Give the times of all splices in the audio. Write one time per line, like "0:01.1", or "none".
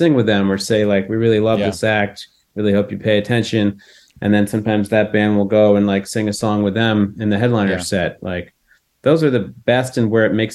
none